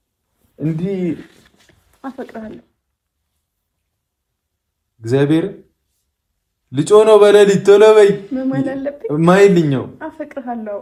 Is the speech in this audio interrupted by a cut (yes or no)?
no